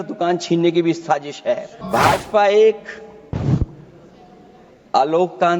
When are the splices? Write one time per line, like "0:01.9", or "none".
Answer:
0:01.8